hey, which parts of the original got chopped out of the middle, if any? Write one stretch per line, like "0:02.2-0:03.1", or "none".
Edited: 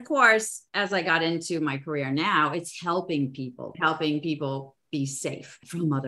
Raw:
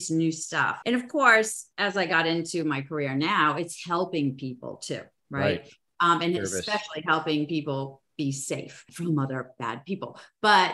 0:04.7-0:06.9